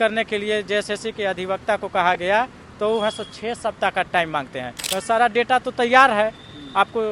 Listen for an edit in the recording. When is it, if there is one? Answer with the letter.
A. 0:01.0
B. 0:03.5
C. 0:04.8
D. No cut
C